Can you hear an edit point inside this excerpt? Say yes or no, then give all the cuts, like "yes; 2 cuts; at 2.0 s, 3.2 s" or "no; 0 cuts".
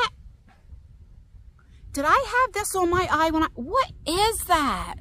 no; 0 cuts